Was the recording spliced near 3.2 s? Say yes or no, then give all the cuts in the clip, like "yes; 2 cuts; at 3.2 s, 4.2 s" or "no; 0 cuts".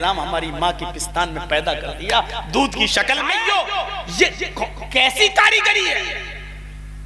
yes; 1 cut; at 3.2 s